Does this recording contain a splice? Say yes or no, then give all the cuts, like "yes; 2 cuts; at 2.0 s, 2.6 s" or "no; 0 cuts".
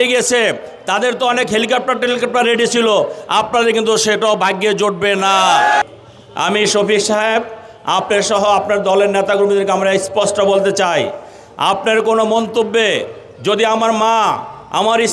yes; 1 cut; at 5.8 s